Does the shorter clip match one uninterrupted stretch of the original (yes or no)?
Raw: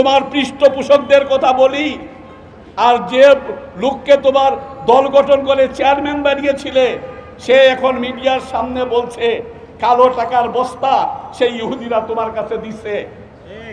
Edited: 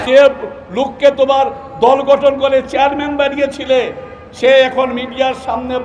yes